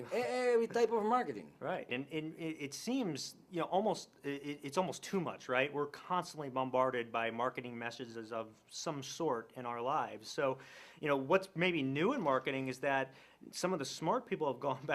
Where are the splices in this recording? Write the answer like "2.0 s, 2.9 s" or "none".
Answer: 3.8 s